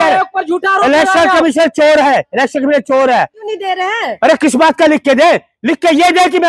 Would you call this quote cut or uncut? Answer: cut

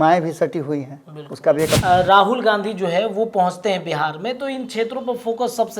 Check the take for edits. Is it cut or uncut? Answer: cut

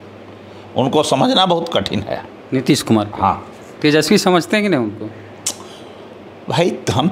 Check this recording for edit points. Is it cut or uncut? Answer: uncut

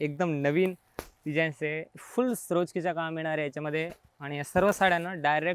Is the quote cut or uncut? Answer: uncut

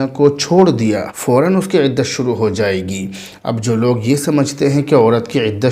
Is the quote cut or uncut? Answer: cut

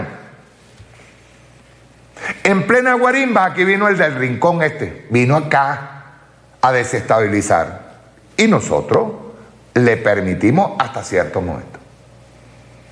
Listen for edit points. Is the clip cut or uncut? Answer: uncut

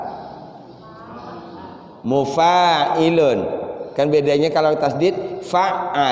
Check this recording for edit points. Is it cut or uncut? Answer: uncut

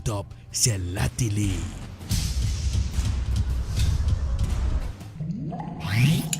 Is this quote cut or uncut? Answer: cut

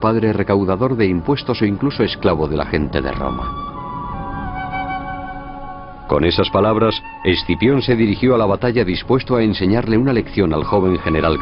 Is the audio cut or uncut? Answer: uncut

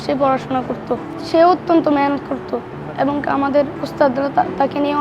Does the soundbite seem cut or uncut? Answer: cut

